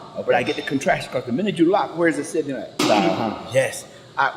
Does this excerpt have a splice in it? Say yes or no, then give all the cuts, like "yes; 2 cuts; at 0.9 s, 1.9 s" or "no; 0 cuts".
yes; 1 cut; at 2.8 s